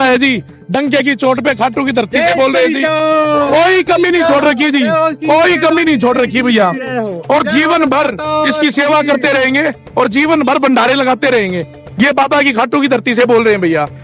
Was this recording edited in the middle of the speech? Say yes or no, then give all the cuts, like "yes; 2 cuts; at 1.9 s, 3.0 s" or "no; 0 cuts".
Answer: no; 0 cuts